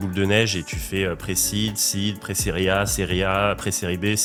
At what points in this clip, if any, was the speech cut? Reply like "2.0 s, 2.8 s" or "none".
none